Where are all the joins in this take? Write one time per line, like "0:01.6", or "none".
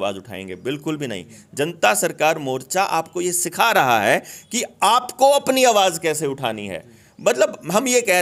none